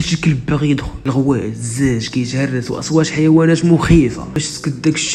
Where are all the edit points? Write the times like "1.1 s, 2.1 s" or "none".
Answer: 0.9 s, 4.3 s